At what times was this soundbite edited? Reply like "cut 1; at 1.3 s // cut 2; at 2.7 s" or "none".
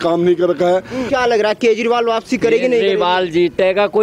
cut 1; at 1.1 s